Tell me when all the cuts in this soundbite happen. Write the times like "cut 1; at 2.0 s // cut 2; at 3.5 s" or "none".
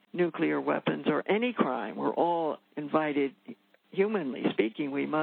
cut 1; at 2.7 s